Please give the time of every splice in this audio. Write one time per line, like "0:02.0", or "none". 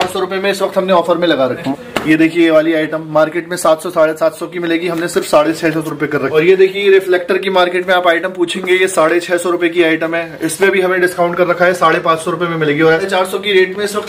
0:01.6
0:06.3
0:13.0